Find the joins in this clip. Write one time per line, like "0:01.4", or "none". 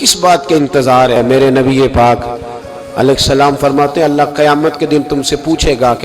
0:01.2